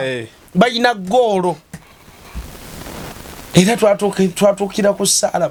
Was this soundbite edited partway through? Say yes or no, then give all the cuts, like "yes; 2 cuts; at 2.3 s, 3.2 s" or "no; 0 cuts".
no; 0 cuts